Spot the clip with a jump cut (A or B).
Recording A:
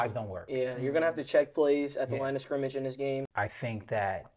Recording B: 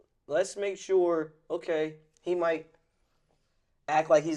A